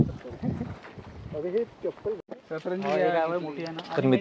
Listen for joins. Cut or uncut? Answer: cut